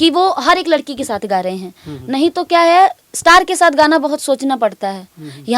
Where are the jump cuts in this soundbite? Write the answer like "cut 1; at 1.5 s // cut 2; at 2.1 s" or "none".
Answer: none